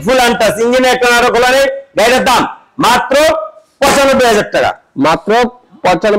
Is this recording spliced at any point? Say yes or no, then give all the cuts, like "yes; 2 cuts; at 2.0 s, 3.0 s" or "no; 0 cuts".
no; 0 cuts